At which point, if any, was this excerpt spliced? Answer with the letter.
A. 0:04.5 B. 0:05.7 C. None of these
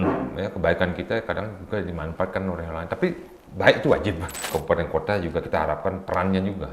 A